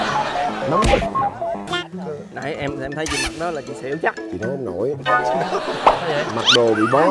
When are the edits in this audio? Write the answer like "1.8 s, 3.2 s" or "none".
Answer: none